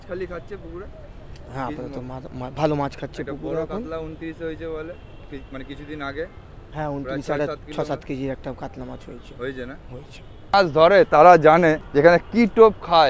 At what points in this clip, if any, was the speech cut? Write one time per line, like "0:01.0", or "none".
0:10.5
0:11.8